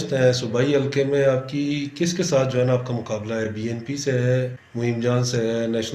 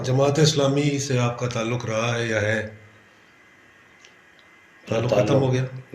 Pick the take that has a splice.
first; 1 cut; at 4.6 s

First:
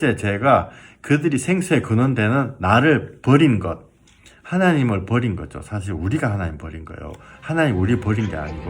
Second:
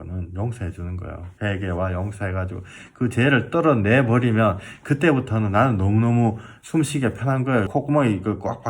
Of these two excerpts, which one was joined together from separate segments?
second; 3 cuts; at 1.2 s, 6.5 s, 7.7 s

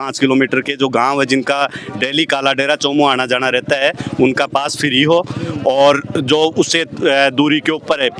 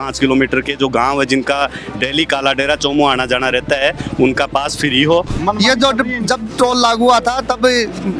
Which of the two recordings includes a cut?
second; 1 cut; at 5.3 s

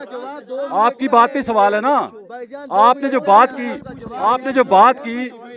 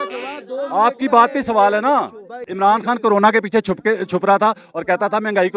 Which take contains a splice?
second; 1 cut; at 2.5 s

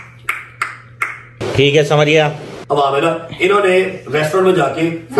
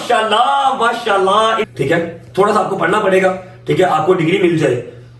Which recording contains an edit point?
second; 1 cut; at 1.7 s

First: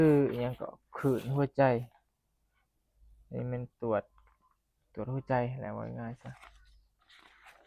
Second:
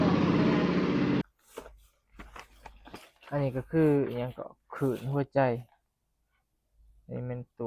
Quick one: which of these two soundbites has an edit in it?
second; 1 cut; at 1.2 s

